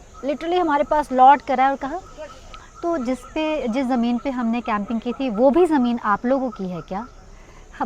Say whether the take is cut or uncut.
uncut